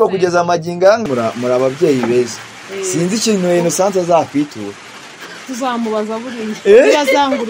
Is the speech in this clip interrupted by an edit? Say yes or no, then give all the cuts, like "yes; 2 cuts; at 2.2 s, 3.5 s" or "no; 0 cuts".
yes; 1 cut; at 1.0 s